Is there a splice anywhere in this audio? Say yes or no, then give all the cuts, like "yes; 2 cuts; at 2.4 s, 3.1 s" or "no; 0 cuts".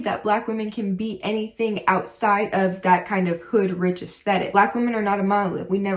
yes; 1 cut; at 4.5 s